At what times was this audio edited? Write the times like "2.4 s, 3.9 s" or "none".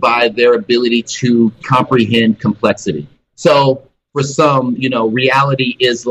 3.3 s, 4.0 s